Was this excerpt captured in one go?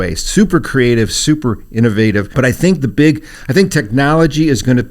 no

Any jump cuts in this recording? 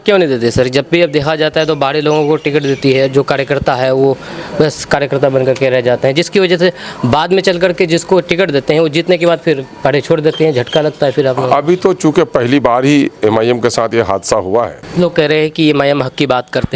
yes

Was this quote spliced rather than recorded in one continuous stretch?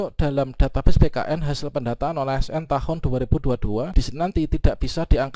yes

